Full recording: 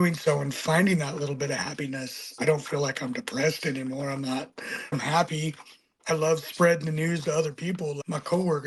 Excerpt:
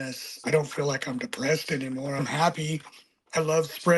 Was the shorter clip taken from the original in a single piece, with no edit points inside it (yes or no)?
no